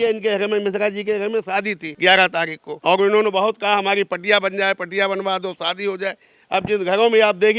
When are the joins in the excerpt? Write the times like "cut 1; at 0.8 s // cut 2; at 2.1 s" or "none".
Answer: cut 1; at 1.8 s // cut 2; at 2.6 s